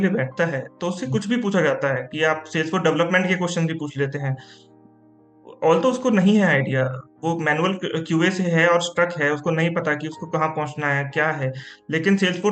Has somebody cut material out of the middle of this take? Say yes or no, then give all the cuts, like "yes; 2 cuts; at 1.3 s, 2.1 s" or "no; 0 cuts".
no; 0 cuts